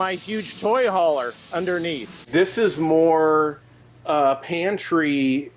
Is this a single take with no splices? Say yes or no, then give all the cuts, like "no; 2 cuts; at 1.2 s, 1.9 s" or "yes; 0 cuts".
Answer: no; 1 cut; at 2.1 s